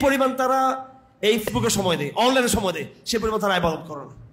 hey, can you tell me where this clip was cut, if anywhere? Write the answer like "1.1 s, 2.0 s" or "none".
1.5 s

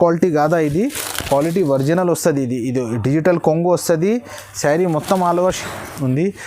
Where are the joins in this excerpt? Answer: 5.6 s

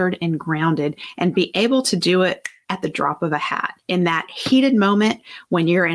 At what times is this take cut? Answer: 1.0 s, 2.5 s, 3.7 s

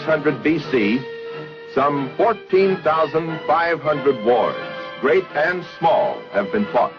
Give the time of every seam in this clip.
3.1 s

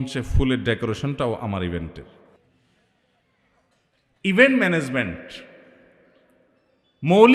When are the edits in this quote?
none

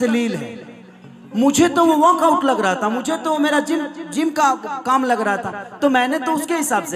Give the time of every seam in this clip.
none

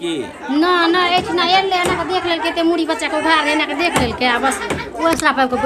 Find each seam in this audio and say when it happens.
none

